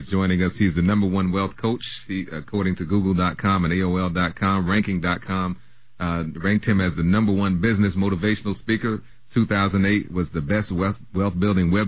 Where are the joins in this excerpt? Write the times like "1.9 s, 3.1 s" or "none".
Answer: none